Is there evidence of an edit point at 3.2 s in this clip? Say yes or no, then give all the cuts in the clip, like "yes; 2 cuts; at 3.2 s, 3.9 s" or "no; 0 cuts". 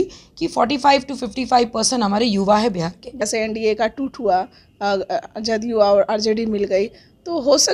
yes; 1 cut; at 3.2 s